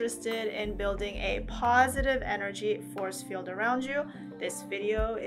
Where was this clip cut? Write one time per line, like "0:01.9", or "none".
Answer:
none